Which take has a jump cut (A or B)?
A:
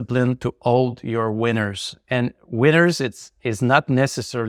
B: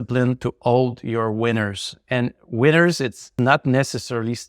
B